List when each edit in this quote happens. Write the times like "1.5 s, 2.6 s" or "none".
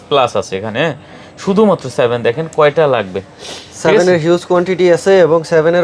none